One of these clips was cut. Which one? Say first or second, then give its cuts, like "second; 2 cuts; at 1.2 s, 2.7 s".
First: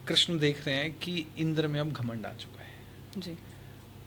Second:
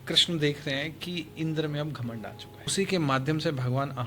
second; 1 cut; at 2.6 s